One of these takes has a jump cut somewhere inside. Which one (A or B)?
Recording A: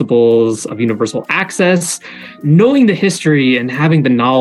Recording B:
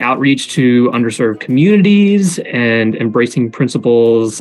A